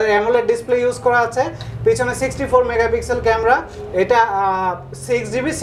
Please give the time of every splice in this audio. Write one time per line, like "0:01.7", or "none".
none